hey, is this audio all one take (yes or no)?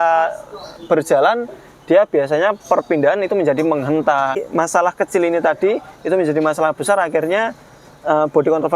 no